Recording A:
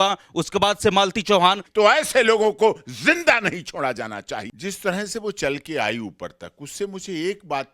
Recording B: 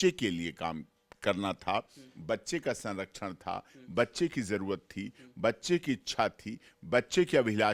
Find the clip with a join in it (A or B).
A